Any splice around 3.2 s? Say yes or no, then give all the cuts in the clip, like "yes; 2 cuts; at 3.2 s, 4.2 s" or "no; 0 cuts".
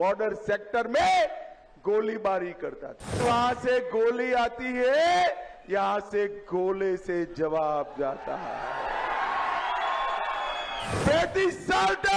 yes; 1 cut; at 3.2 s